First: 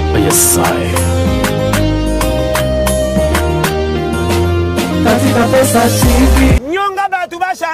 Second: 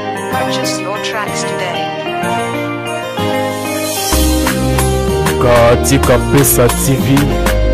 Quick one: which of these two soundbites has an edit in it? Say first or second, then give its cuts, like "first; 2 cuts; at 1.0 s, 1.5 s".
first; 1 cut; at 6.6 s